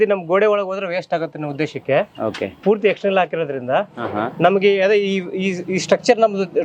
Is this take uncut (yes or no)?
yes